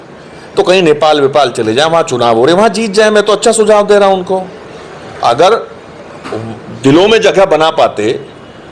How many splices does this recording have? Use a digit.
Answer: 0